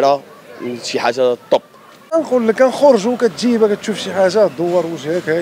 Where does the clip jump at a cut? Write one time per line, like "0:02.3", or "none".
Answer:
0:02.1